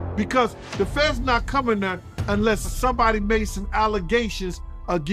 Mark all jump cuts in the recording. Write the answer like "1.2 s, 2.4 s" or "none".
2.7 s